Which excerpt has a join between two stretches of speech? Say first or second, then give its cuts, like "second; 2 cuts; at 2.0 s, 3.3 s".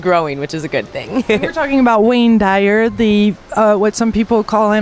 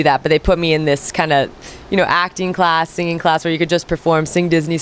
first; 1 cut; at 1.5 s